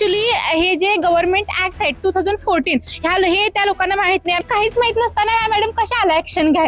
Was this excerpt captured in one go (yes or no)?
no